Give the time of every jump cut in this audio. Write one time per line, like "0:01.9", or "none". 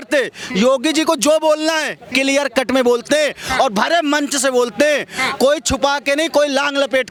none